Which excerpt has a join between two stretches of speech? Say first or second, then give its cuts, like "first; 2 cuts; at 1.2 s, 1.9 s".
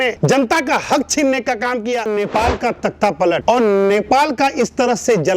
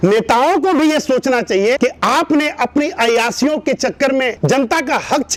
first; 1 cut; at 2.1 s